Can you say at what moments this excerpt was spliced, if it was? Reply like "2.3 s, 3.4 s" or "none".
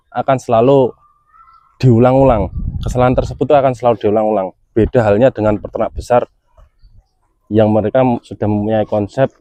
none

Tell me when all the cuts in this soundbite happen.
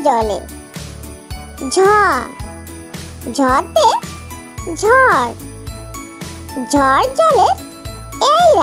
none

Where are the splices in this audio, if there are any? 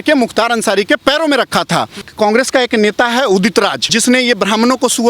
2.0 s

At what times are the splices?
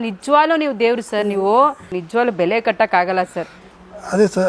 1.9 s

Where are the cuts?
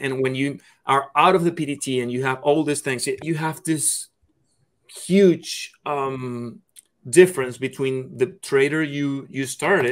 3.2 s

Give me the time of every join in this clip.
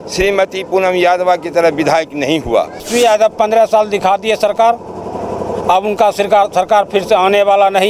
2.9 s

